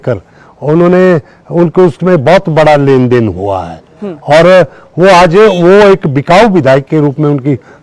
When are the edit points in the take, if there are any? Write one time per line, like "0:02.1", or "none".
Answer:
none